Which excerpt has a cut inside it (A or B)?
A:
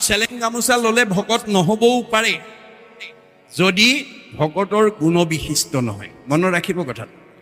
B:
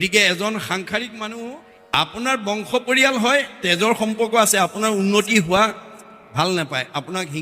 B